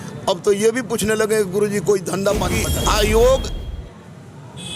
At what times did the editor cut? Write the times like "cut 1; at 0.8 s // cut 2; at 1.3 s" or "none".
cut 1; at 2.6 s